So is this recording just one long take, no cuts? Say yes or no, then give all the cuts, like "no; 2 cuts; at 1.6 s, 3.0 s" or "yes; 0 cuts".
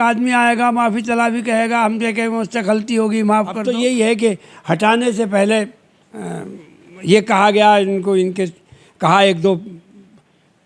no; 1 cut; at 3.7 s